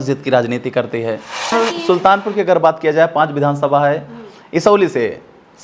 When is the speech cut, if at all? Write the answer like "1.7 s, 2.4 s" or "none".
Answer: 1.5 s